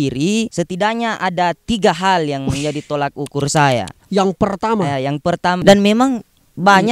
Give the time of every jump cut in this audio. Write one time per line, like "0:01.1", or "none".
0:04.0
0:05.6